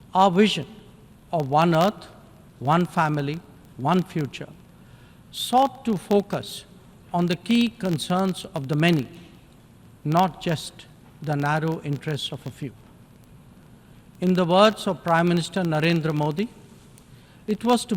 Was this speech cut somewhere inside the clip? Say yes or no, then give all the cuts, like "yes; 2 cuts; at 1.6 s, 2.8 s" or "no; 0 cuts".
no; 0 cuts